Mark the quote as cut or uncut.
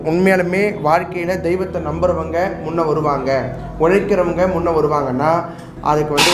uncut